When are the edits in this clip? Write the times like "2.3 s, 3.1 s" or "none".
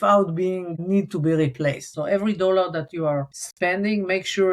1.9 s, 3.4 s

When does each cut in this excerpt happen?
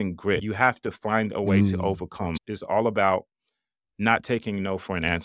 2.4 s

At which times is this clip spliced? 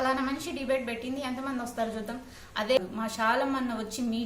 2.8 s

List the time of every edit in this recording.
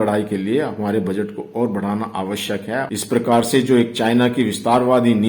none

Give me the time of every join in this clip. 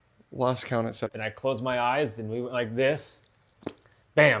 1.0 s

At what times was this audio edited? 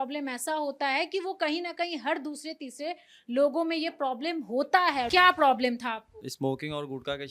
5.1 s, 6.3 s

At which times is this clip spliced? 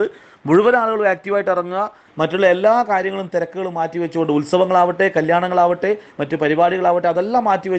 2.1 s

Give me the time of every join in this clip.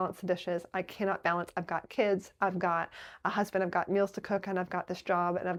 none

